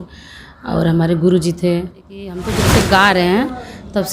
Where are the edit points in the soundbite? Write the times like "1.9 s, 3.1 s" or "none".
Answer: 2.5 s